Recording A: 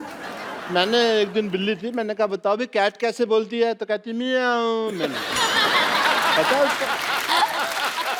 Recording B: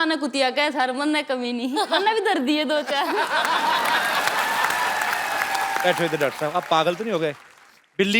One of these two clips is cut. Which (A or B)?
B